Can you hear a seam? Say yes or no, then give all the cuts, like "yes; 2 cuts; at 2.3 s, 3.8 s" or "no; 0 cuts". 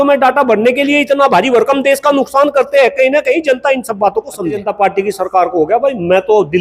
yes; 1 cut; at 4.6 s